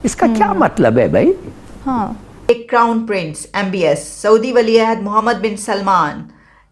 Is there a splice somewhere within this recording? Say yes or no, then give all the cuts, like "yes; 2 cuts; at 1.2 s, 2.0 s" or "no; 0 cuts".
yes; 1 cut; at 2.4 s